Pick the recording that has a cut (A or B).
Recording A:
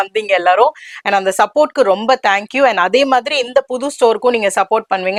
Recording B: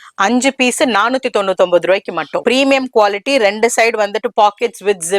B